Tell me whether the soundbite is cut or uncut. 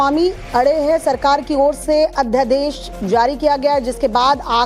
uncut